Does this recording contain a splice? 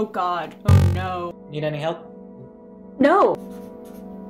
yes; 2 cuts; at 1.3 s, 3.4 s

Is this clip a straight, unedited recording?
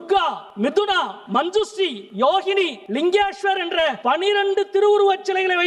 no; 4 cuts; at 0.8 s, 2.0 s, 2.8 s, 4.0 s

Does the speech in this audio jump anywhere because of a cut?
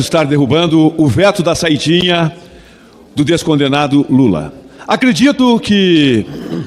no; 0 cuts

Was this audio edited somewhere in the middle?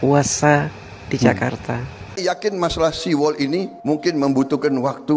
yes; 1 cut; at 2.2 s

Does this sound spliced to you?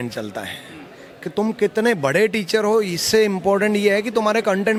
no; 0 cuts

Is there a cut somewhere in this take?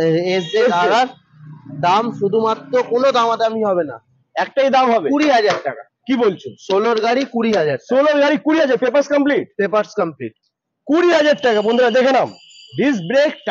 no; 0 cuts

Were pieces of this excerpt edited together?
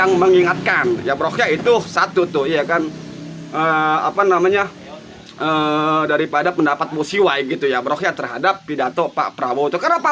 no; 0 cuts

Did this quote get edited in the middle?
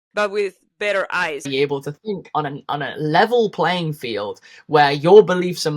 yes; 1 cut; at 1.5 s

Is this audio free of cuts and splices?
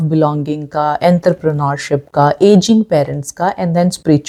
yes; 0 cuts

